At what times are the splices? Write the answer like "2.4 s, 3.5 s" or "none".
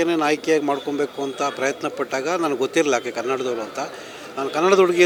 none